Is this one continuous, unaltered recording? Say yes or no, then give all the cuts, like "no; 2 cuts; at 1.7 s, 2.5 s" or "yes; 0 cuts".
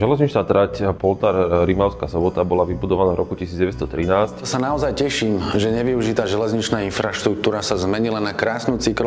no; 2 cuts; at 1.0 s, 4.5 s